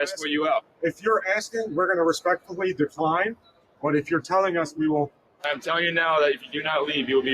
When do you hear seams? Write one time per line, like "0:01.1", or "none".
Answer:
0:05.5